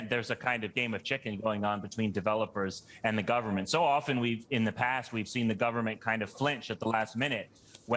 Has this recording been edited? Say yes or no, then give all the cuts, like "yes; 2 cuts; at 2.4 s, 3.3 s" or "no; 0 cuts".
no; 0 cuts